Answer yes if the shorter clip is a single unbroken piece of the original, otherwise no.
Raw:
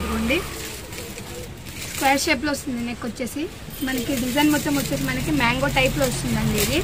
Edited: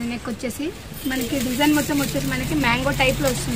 yes